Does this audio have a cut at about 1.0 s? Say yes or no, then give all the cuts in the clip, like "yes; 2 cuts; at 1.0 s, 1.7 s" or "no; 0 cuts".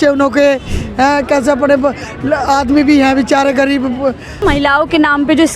no; 1 cut; at 4.4 s